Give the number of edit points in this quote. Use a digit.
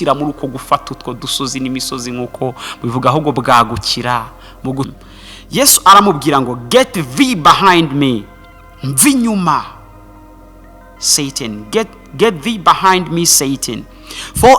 1